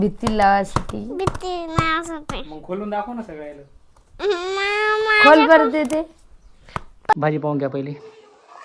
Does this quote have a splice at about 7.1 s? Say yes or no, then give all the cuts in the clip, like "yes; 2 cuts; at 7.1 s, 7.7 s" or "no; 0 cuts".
yes; 1 cut; at 7.1 s